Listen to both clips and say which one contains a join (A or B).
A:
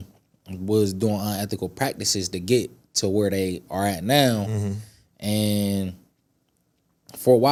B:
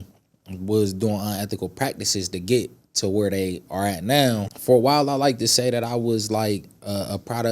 B